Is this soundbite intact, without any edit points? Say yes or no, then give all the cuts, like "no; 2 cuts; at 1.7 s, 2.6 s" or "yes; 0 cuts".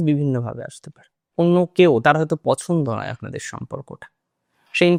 yes; 0 cuts